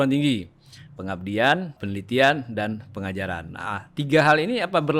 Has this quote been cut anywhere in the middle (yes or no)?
yes